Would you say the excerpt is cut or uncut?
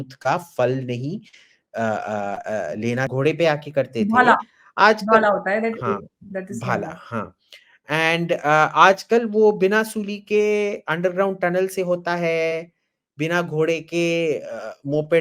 cut